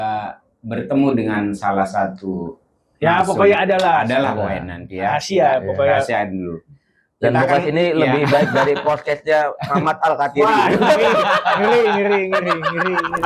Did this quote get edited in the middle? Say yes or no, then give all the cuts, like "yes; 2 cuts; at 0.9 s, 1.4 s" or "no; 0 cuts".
no; 0 cuts